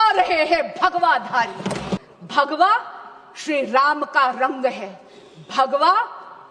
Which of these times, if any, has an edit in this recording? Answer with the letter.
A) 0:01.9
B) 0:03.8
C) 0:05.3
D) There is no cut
A